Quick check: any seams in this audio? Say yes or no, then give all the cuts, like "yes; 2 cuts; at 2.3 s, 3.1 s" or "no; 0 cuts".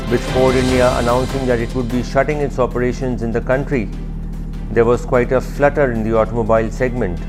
no; 0 cuts